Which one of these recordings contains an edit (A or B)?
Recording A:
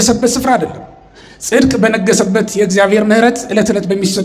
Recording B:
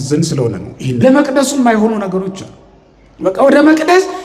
B